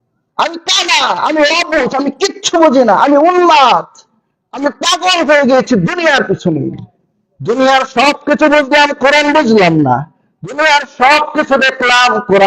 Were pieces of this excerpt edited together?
no; 0 cuts

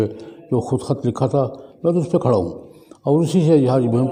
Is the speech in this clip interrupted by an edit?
no; 0 cuts

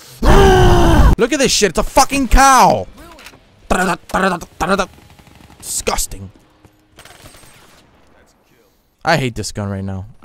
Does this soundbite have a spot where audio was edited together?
no; 0 cuts

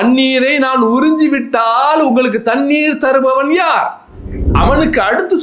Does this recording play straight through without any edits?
no; 1 cut; at 4.5 s

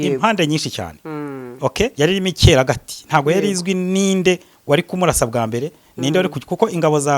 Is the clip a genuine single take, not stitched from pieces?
no; 1 cut; at 1.9 s

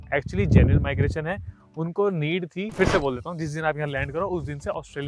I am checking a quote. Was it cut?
yes; 1 cut; at 2.7 s

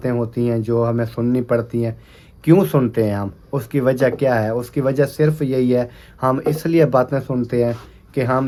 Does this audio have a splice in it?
no; 0 cuts

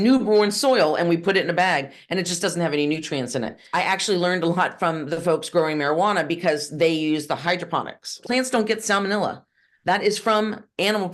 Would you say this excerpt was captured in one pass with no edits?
no; 2 cuts; at 3.6 s, 8.2 s

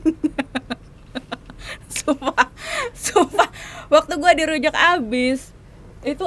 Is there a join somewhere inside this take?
no; 0 cuts

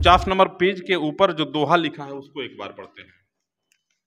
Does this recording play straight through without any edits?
yes; 0 cuts

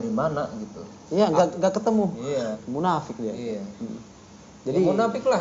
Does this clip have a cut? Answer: yes; 1 cut; at 2.6 s

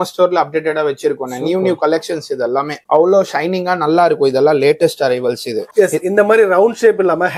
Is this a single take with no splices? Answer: yes; 0 cuts

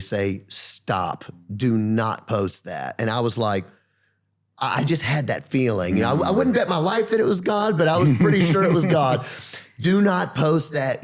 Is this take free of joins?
yes; 0 cuts

